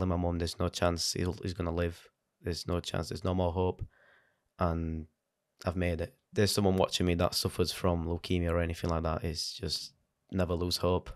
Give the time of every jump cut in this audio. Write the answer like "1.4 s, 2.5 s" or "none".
6.2 s